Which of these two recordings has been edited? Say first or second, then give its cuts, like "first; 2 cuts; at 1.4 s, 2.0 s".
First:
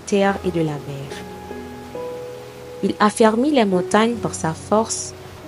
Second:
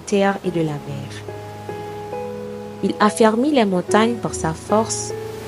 second; 2 cuts; at 0.9 s, 2.1 s